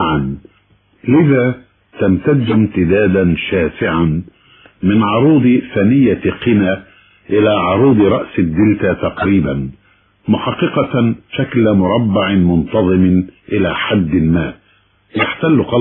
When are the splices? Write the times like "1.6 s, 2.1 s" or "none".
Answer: 11.3 s